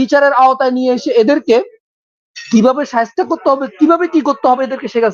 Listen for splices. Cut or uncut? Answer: uncut